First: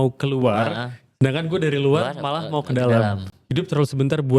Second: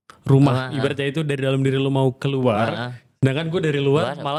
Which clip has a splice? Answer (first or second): first